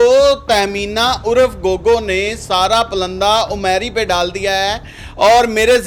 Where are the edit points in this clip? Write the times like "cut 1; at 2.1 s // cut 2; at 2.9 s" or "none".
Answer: none